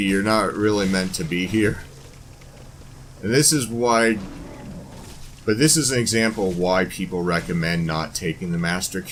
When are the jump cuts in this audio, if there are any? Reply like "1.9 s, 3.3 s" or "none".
none